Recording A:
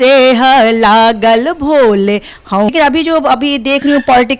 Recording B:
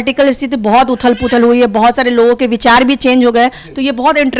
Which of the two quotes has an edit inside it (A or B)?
A